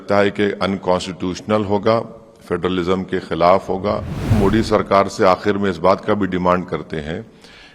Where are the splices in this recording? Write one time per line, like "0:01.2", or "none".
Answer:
0:04.3